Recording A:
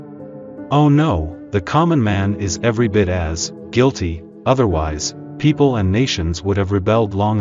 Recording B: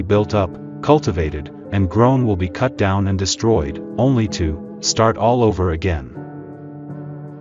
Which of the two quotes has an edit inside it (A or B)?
B